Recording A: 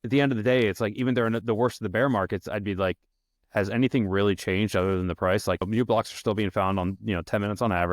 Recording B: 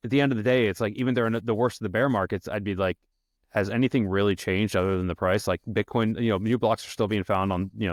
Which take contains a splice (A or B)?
A